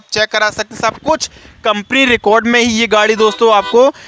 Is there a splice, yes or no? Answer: no